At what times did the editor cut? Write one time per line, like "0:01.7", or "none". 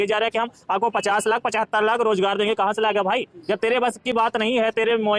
none